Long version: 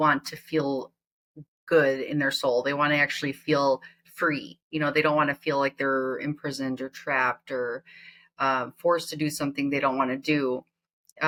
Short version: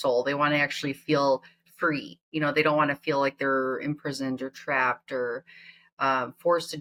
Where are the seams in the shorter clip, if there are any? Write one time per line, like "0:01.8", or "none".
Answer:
none